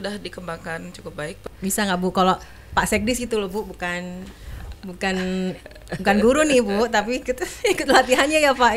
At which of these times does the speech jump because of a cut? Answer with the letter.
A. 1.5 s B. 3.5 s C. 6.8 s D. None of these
A